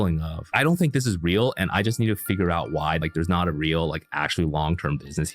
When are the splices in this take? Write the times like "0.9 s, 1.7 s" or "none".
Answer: 3.0 s